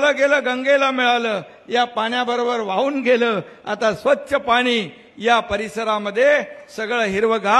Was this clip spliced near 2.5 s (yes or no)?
no